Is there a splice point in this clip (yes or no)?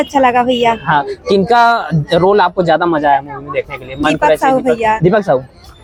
no